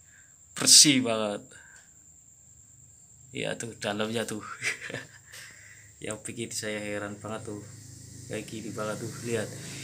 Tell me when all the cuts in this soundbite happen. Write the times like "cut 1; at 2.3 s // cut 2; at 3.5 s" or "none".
none